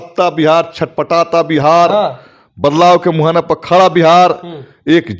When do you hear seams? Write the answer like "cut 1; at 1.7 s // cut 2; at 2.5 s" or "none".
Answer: none